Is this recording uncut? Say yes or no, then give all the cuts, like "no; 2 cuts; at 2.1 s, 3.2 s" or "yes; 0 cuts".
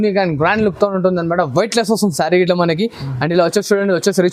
yes; 0 cuts